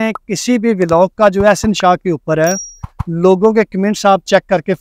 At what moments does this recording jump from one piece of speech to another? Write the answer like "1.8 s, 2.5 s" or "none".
none